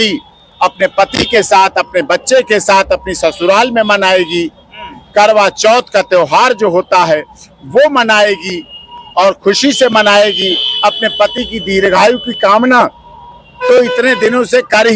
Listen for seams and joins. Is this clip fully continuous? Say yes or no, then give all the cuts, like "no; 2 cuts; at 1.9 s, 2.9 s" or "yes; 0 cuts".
yes; 0 cuts